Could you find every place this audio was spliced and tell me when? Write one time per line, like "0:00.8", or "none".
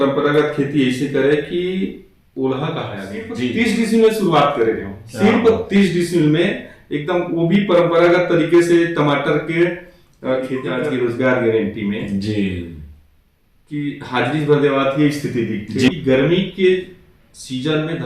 0:03.4
0:10.7
0:15.9